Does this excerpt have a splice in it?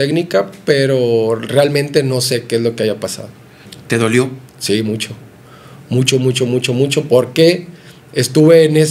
yes; 1 cut; at 3.7 s

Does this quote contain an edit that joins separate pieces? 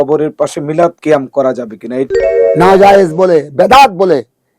yes; 2 cuts; at 1.0 s, 2.1 s

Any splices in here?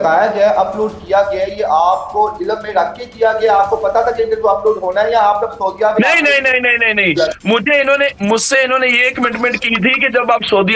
no; 0 cuts

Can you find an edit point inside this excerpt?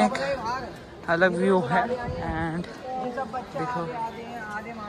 no; 0 cuts

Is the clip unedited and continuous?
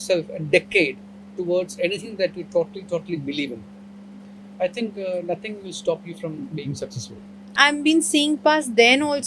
no; 1 cut; at 7.5 s

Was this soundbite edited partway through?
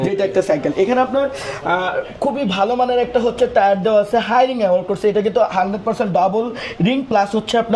no; 0 cuts

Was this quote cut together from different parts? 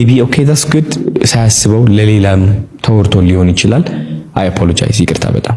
no; 0 cuts

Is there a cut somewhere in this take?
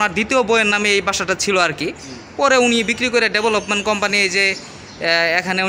no; 0 cuts

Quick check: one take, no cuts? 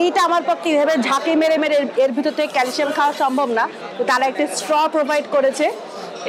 yes; 0 cuts

